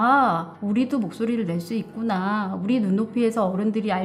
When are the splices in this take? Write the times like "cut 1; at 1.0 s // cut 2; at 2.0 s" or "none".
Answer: none